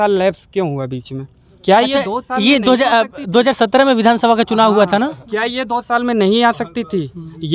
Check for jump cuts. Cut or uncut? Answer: uncut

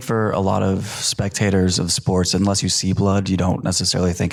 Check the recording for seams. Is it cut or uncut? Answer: uncut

